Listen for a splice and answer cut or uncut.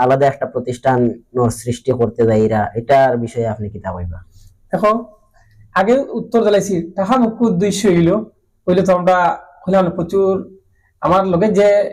uncut